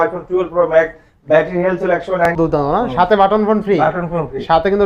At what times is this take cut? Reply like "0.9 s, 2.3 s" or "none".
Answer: 2.3 s